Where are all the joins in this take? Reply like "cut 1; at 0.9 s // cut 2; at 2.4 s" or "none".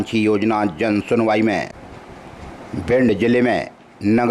cut 1; at 1.8 s